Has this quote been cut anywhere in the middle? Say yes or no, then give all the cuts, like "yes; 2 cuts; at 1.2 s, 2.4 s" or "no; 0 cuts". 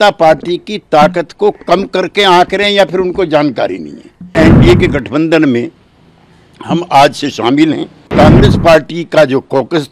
yes; 2 cuts; at 4.3 s, 8.1 s